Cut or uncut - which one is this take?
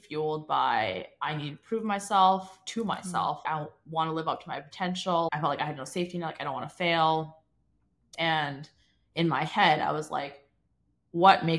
cut